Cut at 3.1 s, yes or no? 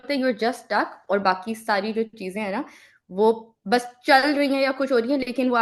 no